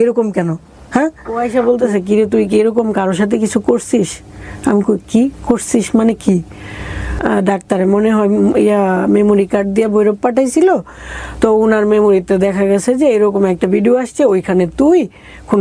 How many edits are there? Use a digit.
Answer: 2